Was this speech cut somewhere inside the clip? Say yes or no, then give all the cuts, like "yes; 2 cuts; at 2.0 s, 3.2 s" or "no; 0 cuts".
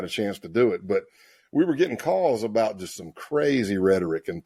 no; 0 cuts